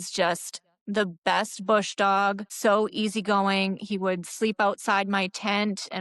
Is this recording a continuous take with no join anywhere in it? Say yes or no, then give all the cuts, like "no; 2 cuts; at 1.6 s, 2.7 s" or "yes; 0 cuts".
no; 1 cut; at 2.5 s